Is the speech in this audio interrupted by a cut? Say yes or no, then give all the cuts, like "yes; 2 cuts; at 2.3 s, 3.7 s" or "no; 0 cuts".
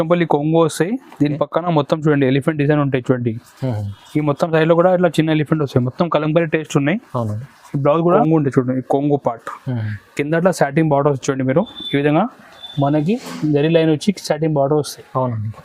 yes; 1 cut; at 8.2 s